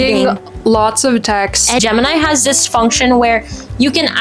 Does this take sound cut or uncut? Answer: cut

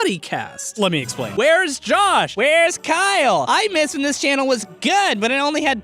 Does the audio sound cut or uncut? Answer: cut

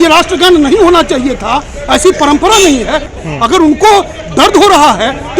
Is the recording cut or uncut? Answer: cut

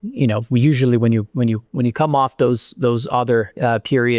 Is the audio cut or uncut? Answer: cut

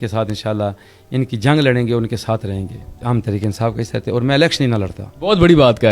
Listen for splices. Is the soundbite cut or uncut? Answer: cut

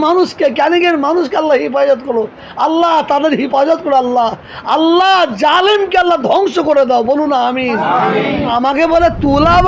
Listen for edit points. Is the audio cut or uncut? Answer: cut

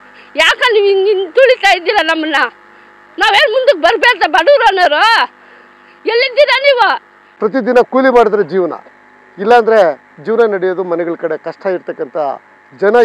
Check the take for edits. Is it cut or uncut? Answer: cut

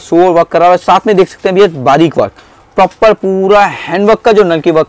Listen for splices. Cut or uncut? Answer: uncut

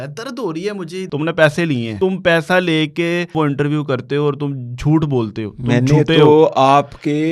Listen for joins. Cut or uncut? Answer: cut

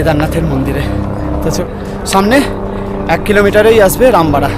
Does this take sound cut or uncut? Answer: cut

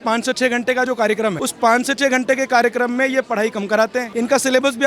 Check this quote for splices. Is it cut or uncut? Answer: cut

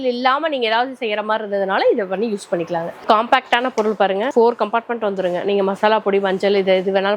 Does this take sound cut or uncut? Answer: cut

